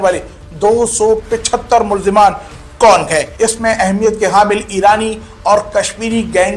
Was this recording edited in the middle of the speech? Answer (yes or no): yes